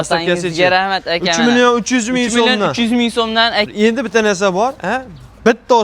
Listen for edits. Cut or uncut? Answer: cut